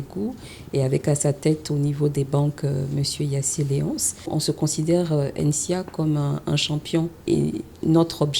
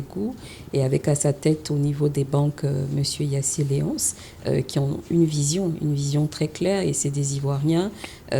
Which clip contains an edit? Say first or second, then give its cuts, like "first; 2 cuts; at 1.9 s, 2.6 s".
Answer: first; 2 cuts; at 4.3 s, 7.2 s